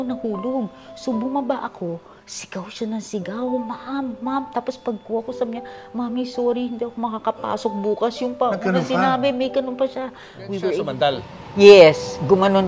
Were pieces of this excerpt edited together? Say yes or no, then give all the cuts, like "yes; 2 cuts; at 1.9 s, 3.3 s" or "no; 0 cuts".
no; 0 cuts